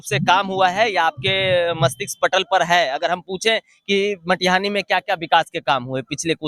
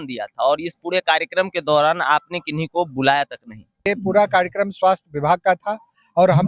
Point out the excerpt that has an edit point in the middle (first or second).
second